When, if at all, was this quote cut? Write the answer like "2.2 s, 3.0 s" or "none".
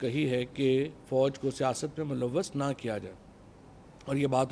none